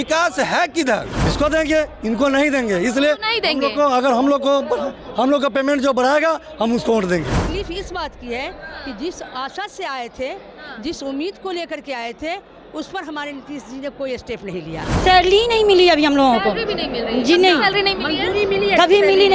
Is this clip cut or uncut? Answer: cut